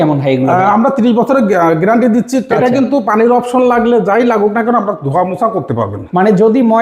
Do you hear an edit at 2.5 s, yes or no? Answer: yes